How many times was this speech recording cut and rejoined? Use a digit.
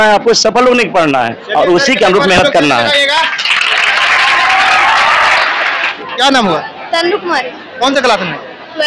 1